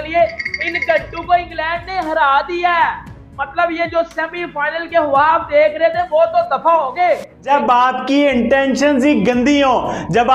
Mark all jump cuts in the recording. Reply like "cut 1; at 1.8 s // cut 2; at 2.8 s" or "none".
cut 1; at 7.5 s